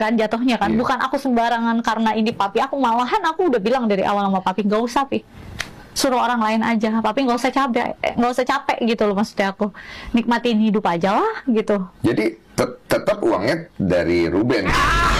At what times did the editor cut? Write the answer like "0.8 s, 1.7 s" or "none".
none